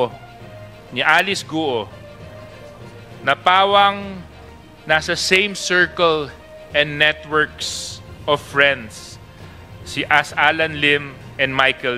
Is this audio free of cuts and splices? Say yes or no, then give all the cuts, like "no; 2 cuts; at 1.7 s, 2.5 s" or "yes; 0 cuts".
yes; 0 cuts